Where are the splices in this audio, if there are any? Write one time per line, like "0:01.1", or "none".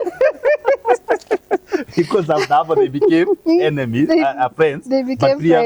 none

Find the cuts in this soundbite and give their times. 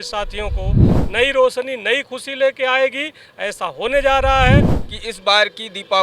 0:00.9
0:04.8

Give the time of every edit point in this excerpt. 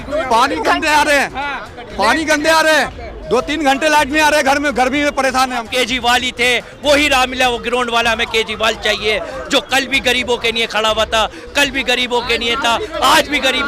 0:05.7

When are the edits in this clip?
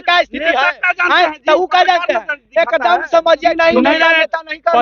0:03.5

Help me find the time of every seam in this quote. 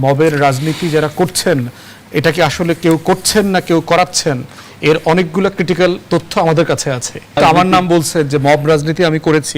0:07.4

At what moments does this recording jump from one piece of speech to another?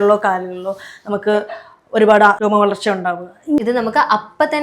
0:02.4
0:03.6

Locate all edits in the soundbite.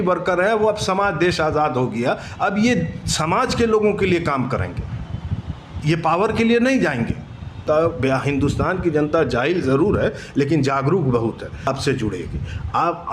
0:07.6
0:11.7

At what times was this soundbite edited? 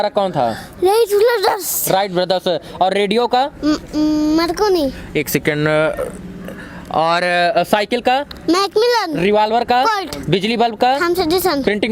none

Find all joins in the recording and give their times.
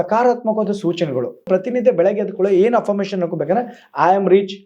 0:01.5

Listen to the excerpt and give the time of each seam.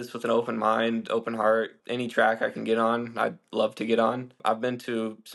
0:01.8
0:04.3

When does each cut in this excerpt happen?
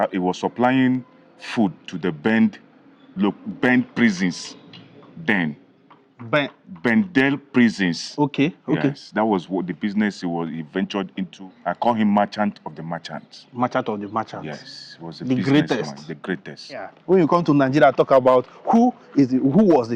0:11.3
0:16.9

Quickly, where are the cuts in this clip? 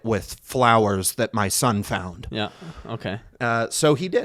0:03.3

